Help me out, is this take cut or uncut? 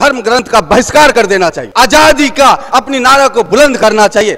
cut